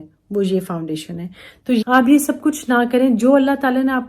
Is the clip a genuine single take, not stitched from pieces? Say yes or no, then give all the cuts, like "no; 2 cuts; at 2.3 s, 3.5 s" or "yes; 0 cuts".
no; 1 cut; at 1.8 s